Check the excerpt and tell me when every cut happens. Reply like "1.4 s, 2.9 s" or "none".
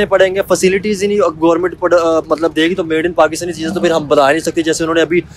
none